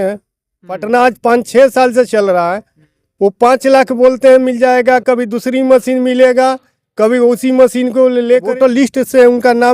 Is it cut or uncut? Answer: cut